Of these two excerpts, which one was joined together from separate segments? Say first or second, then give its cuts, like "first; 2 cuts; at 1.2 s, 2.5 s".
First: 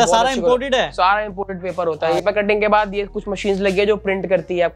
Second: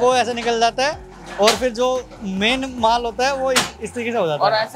first; 1 cut; at 2.2 s